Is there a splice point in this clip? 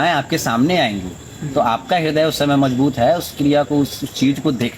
no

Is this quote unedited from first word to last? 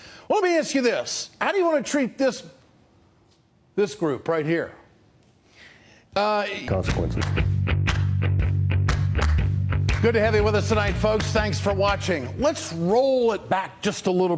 yes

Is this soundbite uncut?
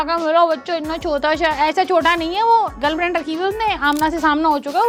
yes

